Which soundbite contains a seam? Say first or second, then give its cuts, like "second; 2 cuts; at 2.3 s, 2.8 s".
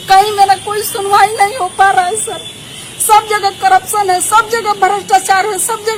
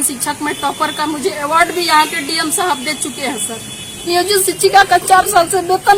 second; 1 cut; at 4.1 s